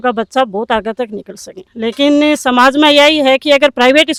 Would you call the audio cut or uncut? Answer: uncut